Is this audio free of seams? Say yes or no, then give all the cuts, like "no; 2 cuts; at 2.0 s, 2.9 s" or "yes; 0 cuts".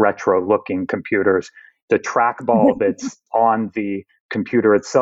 no; 2 cuts; at 1.7 s, 3.2 s